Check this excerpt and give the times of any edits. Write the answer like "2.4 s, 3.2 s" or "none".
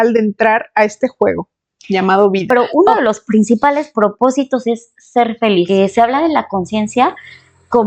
2.7 s, 5.7 s